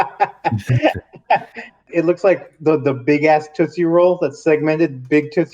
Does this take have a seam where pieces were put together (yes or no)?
yes